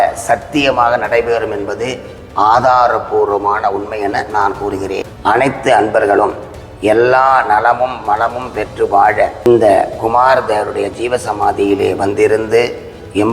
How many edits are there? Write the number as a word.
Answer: two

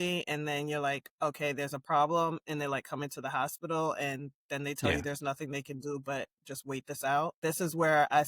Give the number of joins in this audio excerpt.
one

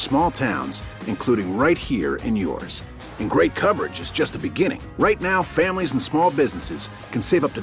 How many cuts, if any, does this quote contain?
zero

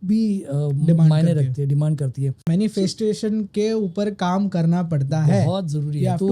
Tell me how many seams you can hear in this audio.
one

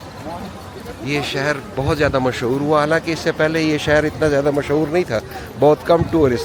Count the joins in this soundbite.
zero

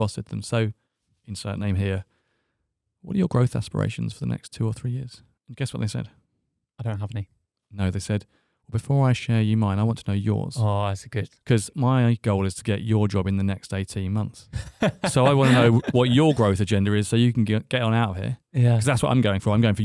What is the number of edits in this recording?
one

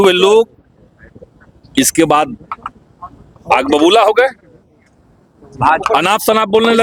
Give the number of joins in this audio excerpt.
zero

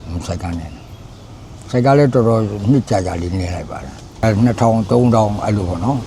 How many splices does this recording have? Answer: one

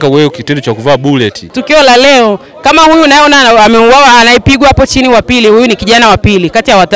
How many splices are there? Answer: one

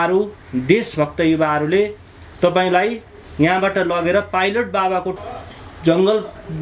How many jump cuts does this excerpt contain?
one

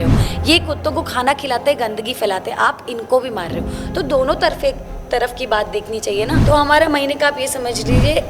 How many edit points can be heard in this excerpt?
one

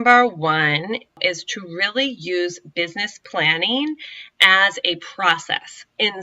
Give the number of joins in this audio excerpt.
one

